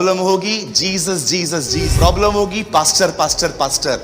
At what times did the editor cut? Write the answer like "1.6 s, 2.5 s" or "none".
1.9 s